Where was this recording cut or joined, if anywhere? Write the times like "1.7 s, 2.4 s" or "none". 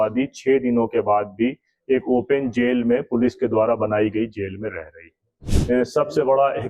5.5 s

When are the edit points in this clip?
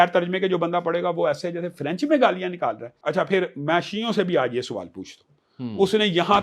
2.9 s

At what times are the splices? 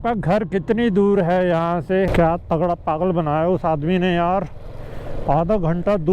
2.1 s

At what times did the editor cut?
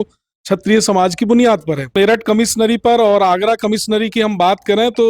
1.9 s

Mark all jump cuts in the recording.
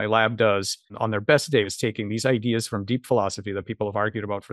0.9 s, 1.7 s

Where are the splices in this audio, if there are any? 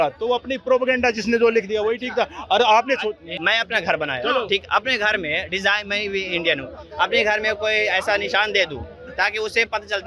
3.3 s

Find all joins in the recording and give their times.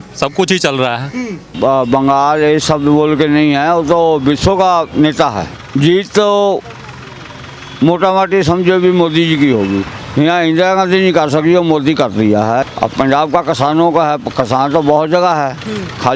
1.5 s, 5.5 s, 10.0 s, 12.7 s

